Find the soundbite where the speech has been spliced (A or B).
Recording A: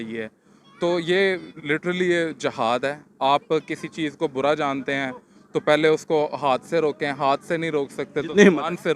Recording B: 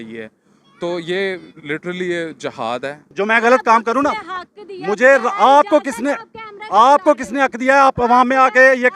B